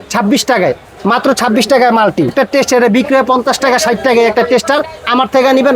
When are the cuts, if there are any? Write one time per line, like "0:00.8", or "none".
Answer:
0:02.3